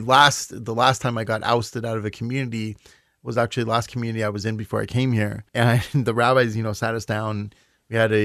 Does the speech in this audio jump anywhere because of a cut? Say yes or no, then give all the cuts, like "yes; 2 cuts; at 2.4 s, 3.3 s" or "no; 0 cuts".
yes; 1 cut; at 5.4 s